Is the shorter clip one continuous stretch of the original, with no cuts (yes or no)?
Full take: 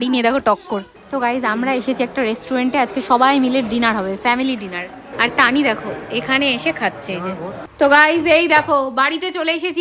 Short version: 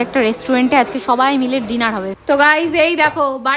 no